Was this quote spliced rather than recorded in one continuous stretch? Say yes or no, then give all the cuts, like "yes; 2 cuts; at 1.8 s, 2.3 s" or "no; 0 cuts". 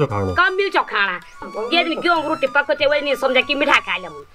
yes; 1 cut; at 1.4 s